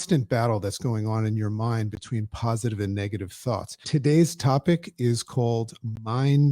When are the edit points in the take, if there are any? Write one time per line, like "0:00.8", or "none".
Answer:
0:03.8